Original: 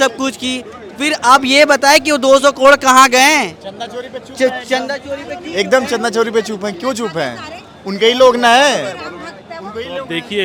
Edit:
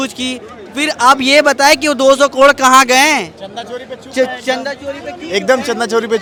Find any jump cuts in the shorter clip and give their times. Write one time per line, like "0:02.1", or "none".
none